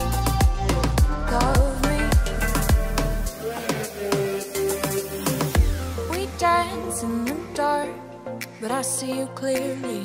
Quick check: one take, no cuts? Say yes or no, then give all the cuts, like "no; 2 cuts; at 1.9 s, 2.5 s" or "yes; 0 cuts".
no; 1 cut; at 4.6 s